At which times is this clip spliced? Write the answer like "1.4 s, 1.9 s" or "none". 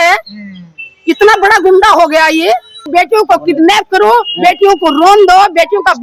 2.9 s